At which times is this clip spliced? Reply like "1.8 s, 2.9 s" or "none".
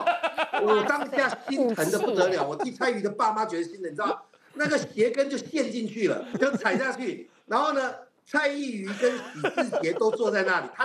6.3 s